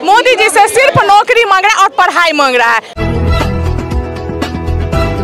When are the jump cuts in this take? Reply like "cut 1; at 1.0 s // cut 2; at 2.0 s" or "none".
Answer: cut 1; at 2.9 s